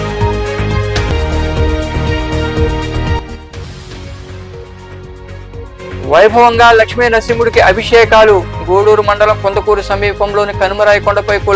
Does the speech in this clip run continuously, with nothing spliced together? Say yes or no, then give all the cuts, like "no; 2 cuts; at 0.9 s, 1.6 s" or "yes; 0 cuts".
no; 1 cut; at 1.0 s